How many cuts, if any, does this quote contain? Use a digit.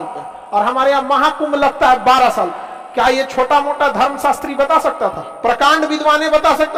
0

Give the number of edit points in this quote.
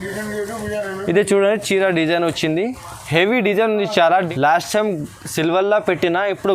1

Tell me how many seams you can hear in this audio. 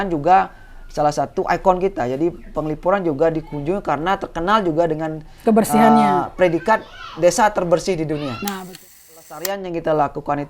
1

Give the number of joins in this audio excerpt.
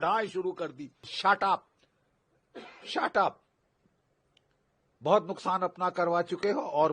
1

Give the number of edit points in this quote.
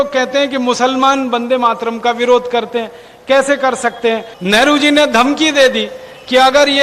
1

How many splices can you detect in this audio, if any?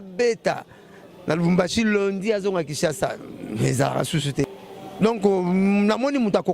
1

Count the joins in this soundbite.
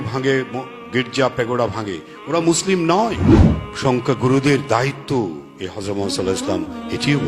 1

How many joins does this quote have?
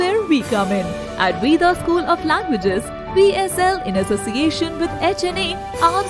0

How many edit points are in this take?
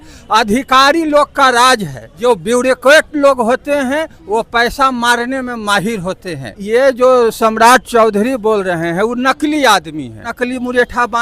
3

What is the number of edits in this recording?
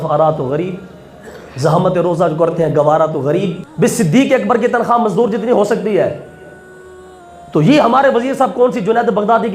1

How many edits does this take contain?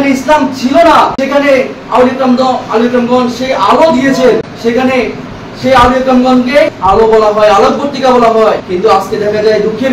4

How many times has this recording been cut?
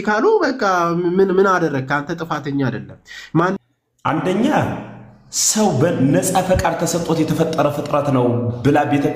1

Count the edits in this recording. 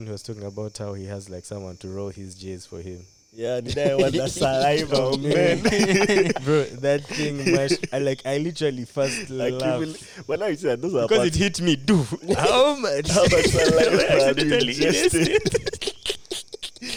0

